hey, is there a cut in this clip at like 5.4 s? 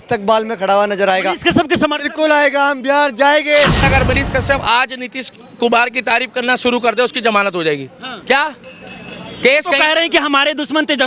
no; 1 cut; at 3.8 s

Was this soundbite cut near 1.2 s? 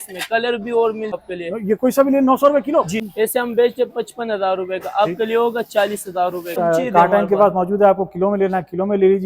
yes; 3 cuts; at 1.2 s, 3.0 s, 6.6 s

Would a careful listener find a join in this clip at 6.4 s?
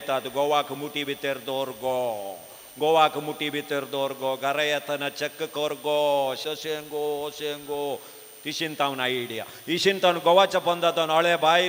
yes; 1 cut; at 6.4 s

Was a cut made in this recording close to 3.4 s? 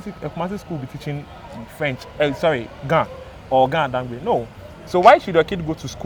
no; 0 cuts

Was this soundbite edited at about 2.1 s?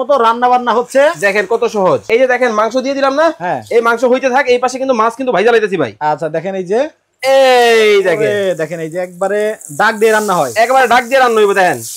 yes; 1 cut; at 2.1 s

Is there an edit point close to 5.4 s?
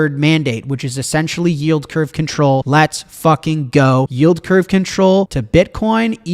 yes; 3 cuts; at 2.7 s, 4.1 s, 5.4 s

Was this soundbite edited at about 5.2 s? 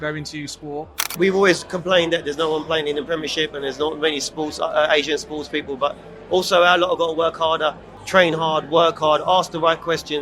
no; 2 cuts; at 1.0 s, 7.9 s

